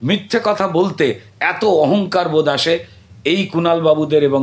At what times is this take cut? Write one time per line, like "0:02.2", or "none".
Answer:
none